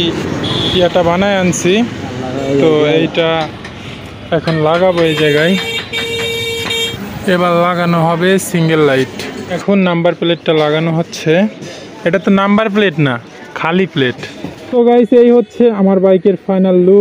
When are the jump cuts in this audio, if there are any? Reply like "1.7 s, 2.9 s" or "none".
6.9 s, 9.4 s, 14.7 s